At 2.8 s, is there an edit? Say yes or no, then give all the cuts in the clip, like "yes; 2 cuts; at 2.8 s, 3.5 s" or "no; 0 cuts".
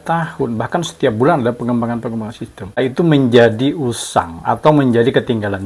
yes; 1 cut; at 2.8 s